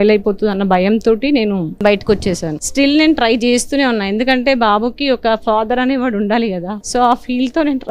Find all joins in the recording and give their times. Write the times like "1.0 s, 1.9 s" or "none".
1.7 s, 2.6 s, 6.7 s